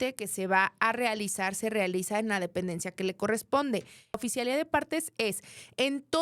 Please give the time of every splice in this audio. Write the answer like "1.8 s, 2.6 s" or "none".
4.2 s